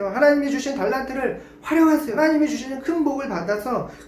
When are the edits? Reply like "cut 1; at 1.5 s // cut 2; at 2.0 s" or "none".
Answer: cut 1; at 2.1 s